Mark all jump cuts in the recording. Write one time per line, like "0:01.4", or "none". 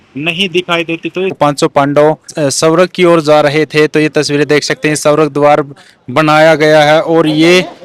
0:01.4
0:02.3